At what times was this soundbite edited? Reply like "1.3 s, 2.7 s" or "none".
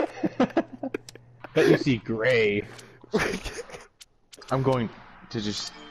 none

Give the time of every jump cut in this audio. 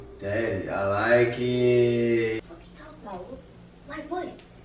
2.4 s

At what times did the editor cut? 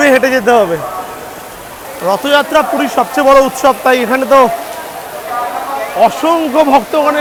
none

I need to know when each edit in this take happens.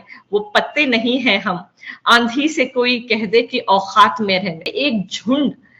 4.7 s

